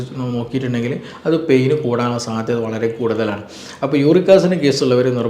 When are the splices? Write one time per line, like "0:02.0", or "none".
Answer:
none